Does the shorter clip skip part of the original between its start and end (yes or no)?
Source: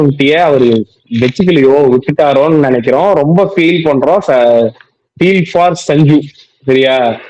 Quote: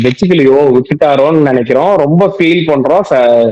no